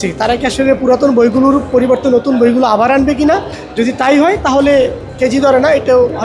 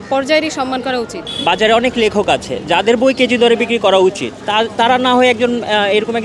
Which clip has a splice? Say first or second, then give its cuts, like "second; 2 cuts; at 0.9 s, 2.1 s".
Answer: second; 2 cuts; at 1.2 s, 4.3 s